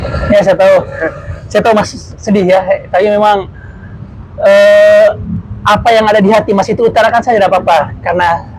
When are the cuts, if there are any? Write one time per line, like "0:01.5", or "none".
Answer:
none